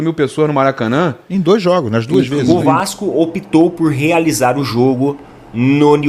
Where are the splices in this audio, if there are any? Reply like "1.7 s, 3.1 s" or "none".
2.5 s